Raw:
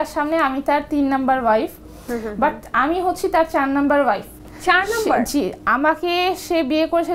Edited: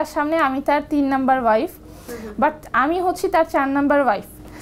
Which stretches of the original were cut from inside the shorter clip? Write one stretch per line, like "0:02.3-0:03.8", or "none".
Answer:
none